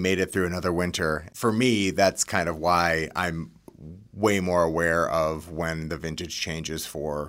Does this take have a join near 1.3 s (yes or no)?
yes